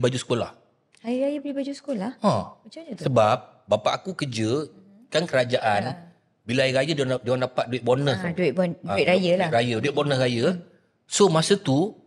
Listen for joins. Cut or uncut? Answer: uncut